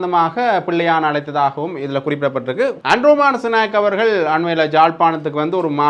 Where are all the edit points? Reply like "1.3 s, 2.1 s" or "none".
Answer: 2.8 s